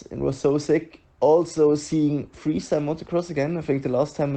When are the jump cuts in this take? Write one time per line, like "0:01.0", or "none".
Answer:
none